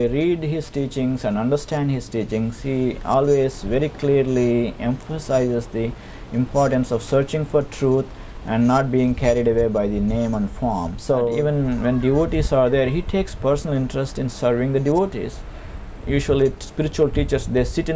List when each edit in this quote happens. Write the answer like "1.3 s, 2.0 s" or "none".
11.3 s